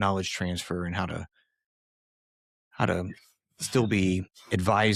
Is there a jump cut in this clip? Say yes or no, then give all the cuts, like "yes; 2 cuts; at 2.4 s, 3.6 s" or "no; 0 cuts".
no; 0 cuts